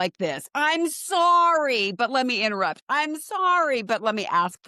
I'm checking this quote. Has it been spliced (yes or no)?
no